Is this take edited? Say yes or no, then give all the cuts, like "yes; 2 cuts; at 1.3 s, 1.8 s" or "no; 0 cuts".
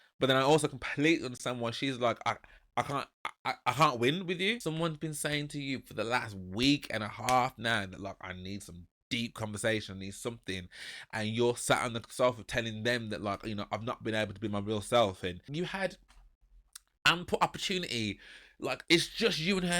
yes; 2 cuts; at 4.6 s, 15.5 s